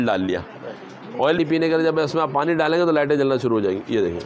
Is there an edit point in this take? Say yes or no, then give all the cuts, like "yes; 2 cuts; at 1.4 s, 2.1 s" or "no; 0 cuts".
yes; 1 cut; at 1.4 s